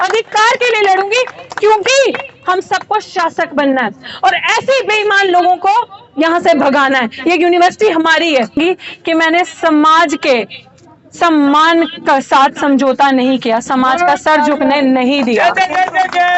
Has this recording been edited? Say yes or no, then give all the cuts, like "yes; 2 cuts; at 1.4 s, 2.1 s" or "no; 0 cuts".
yes; 1 cut; at 8.6 s